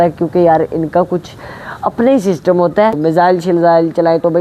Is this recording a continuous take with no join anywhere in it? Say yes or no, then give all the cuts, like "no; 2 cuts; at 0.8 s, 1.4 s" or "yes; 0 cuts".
no; 1 cut; at 3.0 s